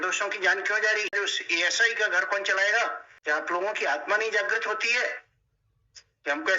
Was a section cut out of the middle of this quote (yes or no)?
yes